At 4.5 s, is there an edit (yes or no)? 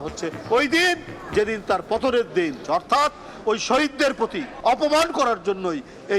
yes